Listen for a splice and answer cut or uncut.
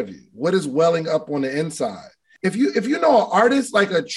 cut